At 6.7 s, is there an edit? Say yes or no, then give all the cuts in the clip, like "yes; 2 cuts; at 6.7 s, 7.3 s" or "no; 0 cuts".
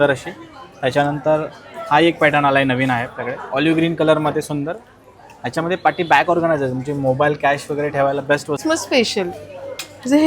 no; 1 cut; at 8.6 s